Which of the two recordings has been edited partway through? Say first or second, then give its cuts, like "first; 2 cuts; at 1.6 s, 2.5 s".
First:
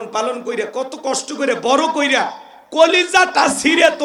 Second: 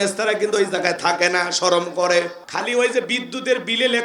second; 1 cut; at 2.4 s